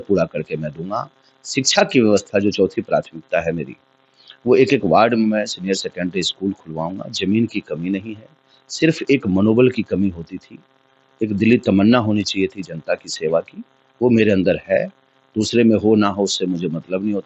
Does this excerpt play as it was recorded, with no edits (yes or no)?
yes